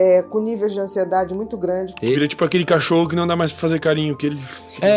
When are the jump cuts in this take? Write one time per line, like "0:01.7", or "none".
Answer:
0:01.9